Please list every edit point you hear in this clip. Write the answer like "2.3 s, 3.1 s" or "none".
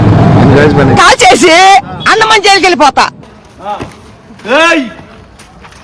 3.3 s